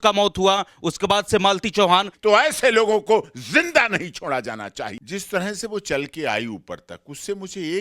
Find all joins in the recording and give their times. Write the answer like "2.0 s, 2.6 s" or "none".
2.1 s, 5.0 s